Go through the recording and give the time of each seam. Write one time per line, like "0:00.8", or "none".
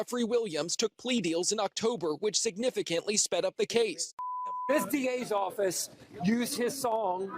0:04.3

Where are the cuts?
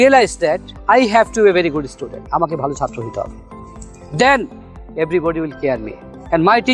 none

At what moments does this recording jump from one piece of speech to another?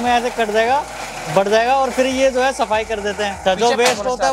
0:03.4

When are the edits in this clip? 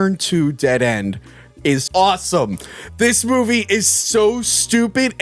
0:01.9

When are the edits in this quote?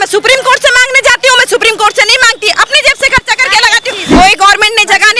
0:04.2

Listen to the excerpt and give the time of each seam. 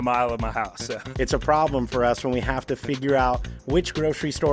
0:01.1

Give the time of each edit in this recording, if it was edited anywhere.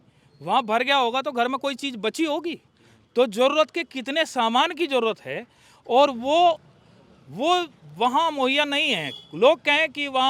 none

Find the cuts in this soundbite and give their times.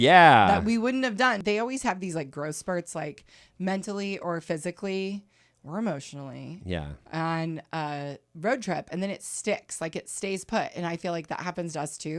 0:01.4

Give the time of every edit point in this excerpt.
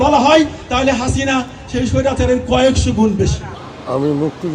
0:03.6

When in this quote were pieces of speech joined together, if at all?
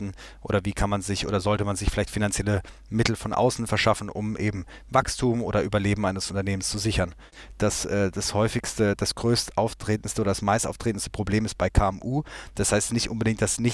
0:07.4

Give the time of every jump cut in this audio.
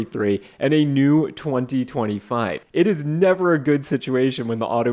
0:02.6

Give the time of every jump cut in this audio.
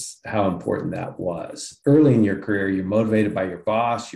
0:01.7

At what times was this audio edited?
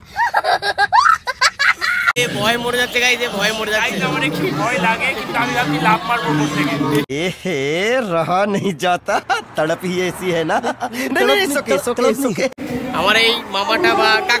0:02.2
0:12.5

